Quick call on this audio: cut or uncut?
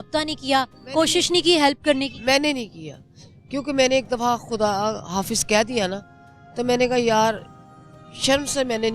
uncut